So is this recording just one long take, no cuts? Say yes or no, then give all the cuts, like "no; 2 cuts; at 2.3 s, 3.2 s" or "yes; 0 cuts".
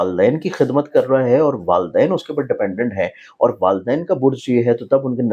yes; 0 cuts